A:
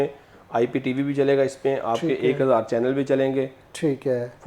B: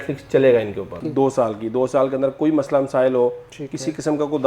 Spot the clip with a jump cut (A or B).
B